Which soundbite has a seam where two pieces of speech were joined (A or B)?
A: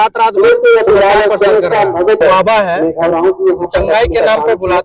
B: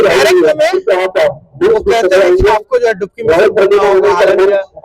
A